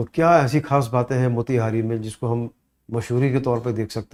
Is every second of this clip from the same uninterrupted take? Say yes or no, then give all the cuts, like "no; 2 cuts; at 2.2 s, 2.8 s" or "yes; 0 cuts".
yes; 0 cuts